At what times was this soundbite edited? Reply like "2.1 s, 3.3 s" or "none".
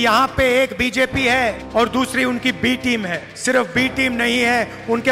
1.6 s, 3.3 s